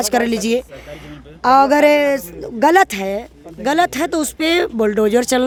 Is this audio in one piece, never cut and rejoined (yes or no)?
yes